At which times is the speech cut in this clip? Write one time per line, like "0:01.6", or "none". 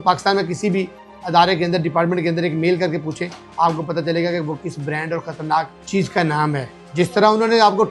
0:05.8
0:06.8